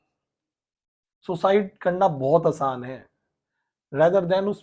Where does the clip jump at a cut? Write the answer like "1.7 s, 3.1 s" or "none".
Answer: none